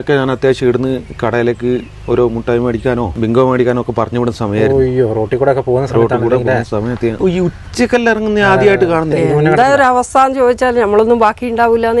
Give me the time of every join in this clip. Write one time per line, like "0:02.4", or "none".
0:03.1
0:07.2
0:09.1